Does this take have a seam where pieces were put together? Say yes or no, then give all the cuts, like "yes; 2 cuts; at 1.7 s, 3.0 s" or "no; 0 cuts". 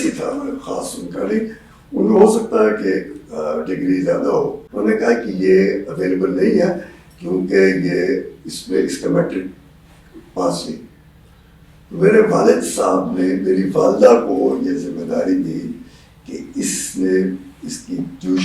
yes; 1 cut; at 4.6 s